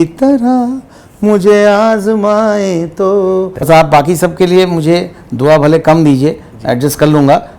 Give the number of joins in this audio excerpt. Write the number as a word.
one